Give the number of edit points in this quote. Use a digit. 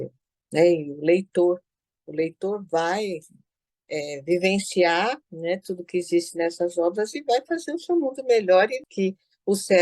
1